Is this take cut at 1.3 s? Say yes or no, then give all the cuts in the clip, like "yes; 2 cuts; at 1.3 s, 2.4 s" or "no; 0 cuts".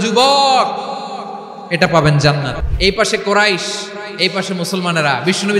no; 1 cut; at 2.6 s